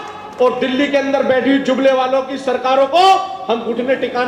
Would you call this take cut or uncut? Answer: uncut